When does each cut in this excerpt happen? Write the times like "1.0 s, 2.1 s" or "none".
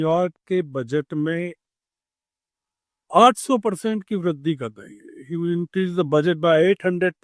none